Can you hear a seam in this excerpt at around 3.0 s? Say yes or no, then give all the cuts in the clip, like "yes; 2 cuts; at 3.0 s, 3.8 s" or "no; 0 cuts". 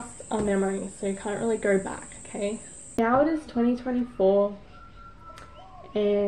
yes; 1 cut; at 3.0 s